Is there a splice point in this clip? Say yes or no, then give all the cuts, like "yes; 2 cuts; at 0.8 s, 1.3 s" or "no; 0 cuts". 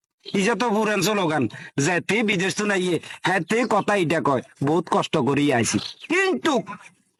no; 0 cuts